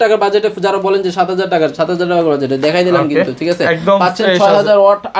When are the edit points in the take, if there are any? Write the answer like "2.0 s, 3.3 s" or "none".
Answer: none